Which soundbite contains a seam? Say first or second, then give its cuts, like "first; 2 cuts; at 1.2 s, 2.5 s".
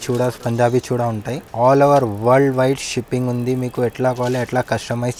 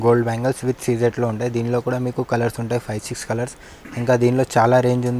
first; 1 cut; at 1.5 s